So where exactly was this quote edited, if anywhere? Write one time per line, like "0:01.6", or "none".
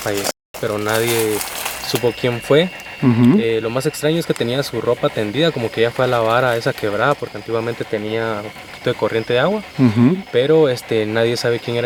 none